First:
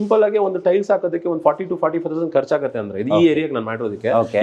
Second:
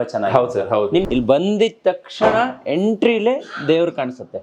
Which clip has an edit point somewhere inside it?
second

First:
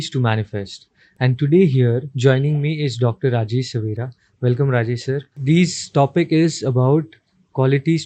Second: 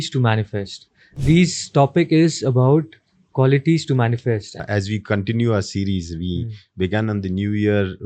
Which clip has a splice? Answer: second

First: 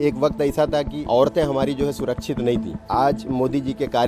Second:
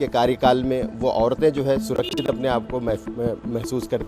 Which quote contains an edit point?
first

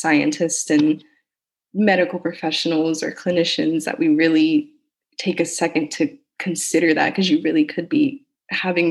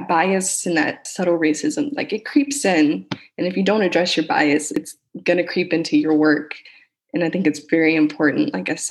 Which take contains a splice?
second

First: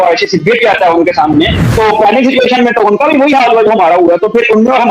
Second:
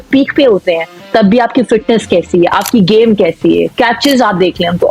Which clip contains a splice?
first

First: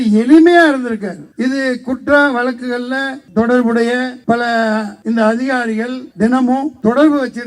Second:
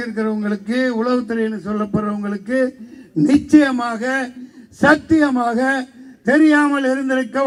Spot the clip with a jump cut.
first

